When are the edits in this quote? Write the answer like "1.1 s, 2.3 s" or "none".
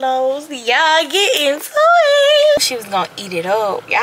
2.6 s